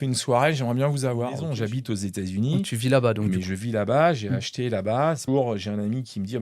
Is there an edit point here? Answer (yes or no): yes